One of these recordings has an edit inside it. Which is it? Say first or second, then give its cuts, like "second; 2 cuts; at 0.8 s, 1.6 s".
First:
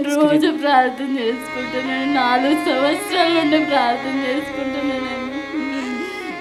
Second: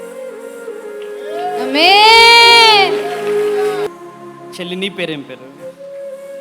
second; 1 cut; at 3.9 s